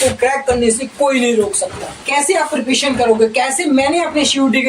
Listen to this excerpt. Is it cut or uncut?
cut